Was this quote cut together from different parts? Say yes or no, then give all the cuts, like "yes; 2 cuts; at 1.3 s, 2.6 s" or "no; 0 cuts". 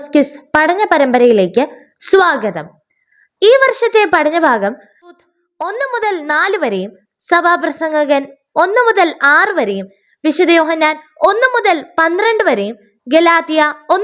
yes; 1 cut; at 5.2 s